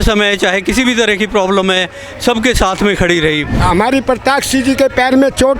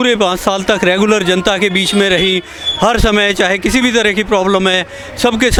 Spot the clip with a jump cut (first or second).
first